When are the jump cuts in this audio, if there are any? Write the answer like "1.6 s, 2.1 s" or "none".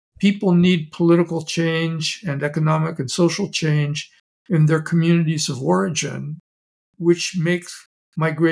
none